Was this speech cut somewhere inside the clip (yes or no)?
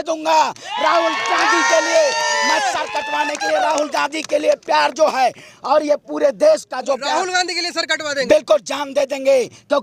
no